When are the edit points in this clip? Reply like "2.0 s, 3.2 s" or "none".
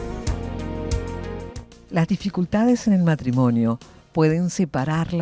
1.3 s